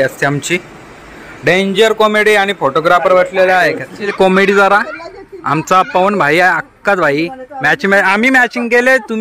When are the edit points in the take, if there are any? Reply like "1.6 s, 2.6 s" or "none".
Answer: 4.0 s